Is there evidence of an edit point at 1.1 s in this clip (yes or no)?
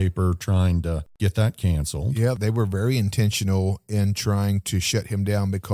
yes